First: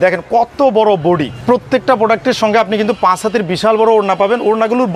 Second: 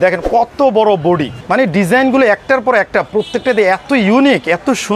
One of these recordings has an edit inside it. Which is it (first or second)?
second